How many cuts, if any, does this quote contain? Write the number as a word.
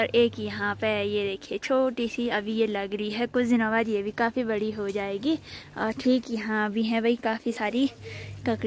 zero